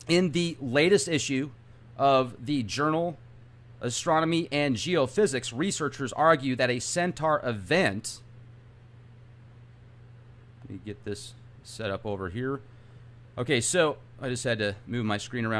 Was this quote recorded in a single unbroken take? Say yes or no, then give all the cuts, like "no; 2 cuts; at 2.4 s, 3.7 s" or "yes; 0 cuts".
no; 1 cut; at 4.4 s